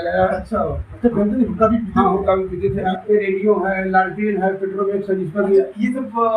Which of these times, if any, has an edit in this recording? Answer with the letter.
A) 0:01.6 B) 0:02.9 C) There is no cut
B